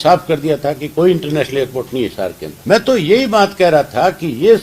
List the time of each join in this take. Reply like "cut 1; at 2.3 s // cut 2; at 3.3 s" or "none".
cut 1; at 2.5 s